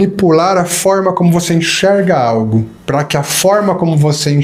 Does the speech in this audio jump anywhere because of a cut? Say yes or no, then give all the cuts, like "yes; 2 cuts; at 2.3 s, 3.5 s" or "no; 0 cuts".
yes; 1 cut; at 2.8 s